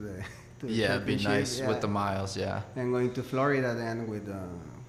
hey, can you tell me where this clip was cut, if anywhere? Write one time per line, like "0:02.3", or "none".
none